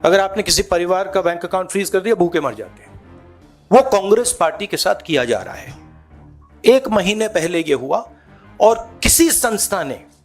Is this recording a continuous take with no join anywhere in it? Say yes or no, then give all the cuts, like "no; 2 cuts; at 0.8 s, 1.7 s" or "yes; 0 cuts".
yes; 0 cuts